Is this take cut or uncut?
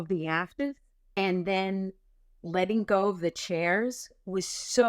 cut